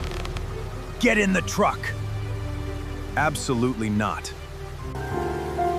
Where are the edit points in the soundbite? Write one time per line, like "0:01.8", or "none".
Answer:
none